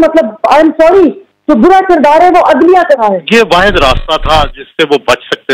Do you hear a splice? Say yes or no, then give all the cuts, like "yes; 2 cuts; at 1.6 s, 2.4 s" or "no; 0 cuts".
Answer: yes; 1 cut; at 3.3 s